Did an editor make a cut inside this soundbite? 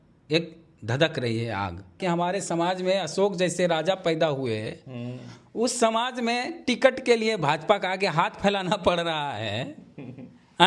yes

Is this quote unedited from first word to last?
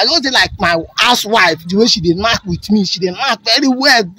yes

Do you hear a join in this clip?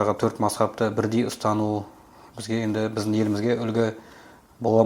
no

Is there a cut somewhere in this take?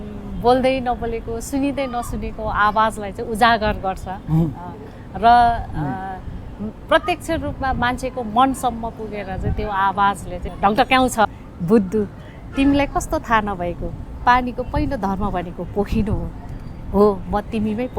yes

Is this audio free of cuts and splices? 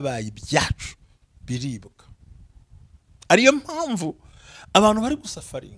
yes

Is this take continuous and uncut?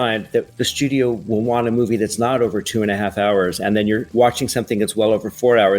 no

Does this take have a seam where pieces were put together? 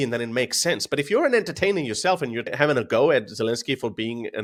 no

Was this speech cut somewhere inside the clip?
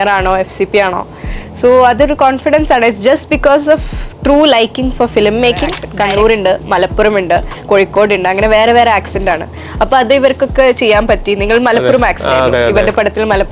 yes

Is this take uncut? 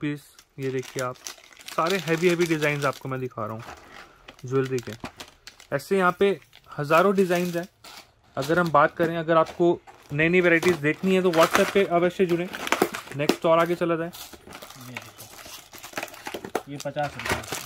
yes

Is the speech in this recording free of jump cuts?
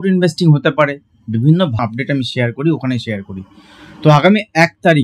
no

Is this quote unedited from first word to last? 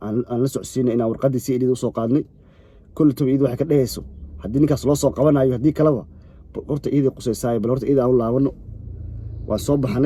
yes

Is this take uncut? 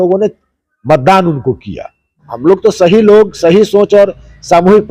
no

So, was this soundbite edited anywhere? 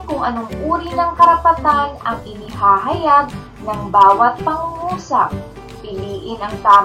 no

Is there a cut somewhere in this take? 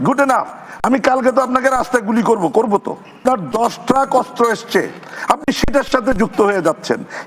yes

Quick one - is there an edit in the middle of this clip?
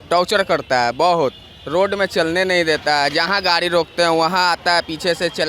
no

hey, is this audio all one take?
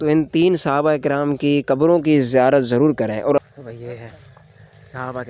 no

